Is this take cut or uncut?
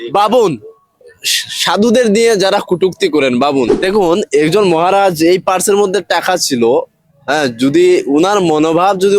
cut